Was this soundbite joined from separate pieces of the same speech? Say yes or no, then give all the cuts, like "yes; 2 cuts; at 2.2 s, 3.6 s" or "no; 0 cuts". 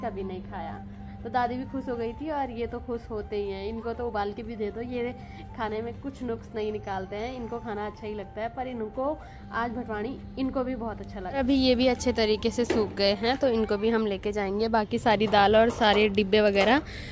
no; 0 cuts